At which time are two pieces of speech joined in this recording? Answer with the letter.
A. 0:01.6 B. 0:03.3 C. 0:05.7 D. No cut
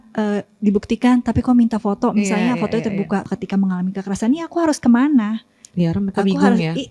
B